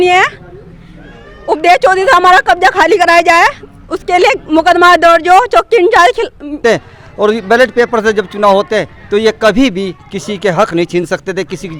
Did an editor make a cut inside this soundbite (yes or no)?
yes